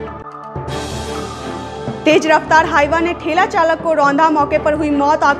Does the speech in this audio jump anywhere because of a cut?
yes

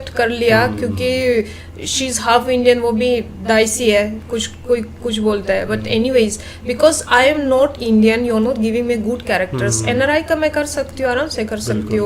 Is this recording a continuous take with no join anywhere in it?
yes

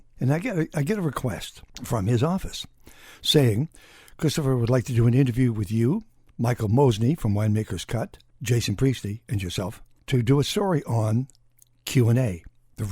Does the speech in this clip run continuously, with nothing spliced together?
no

